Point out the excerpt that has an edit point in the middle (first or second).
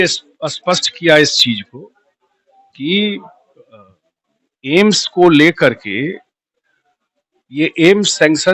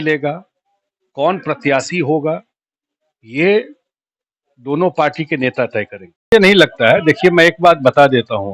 second